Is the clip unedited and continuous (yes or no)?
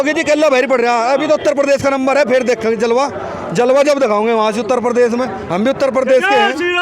yes